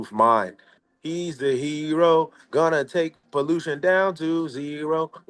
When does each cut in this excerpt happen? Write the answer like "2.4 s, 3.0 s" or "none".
0.9 s